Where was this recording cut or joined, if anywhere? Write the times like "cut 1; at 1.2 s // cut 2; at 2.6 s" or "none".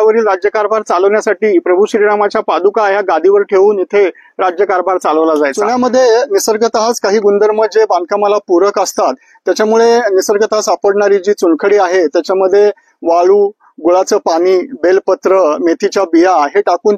cut 1; at 5.6 s